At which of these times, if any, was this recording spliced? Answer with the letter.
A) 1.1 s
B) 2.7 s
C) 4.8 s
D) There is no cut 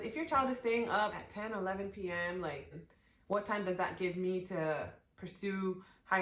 B